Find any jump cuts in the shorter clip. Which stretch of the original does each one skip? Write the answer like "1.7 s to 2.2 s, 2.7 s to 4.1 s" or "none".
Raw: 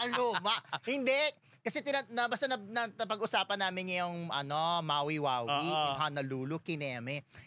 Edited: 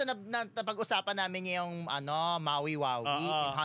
none